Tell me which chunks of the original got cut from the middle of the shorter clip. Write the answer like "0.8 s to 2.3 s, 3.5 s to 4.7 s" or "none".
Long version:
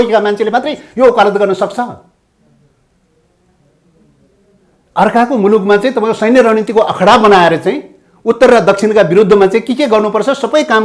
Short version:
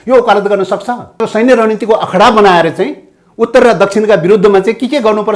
2.1 s to 6.0 s